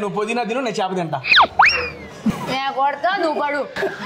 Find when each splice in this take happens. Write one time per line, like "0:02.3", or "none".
0:02.3